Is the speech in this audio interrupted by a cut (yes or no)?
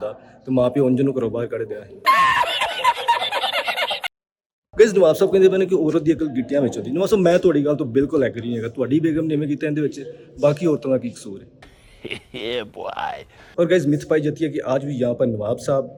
no